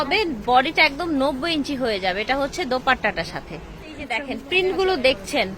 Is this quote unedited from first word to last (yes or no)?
no